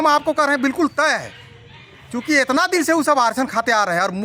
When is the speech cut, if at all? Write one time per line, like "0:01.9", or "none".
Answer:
none